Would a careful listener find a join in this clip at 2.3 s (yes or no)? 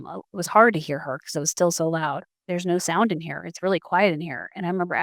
yes